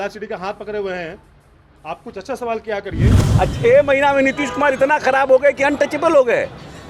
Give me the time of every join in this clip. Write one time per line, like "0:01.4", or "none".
0:03.2